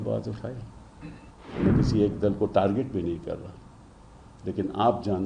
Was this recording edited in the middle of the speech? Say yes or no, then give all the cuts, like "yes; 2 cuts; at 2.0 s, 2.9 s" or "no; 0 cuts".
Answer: yes; 1 cut; at 1.3 s